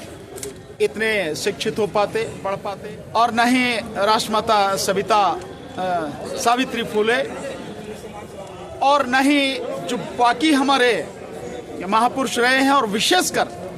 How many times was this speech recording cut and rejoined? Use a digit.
1